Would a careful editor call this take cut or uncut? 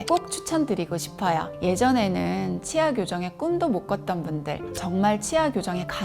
cut